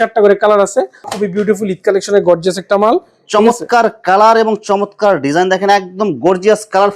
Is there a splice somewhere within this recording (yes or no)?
yes